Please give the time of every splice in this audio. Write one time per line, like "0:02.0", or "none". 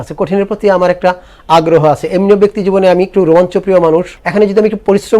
0:04.2